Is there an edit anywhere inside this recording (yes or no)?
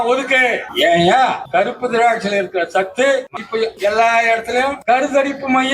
yes